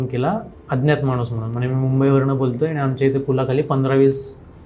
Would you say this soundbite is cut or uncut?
uncut